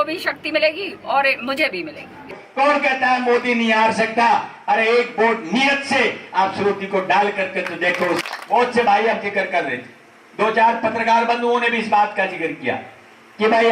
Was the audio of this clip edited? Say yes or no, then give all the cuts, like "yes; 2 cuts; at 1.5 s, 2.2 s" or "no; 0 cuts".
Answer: yes; 2 cuts; at 2.4 s, 8.3 s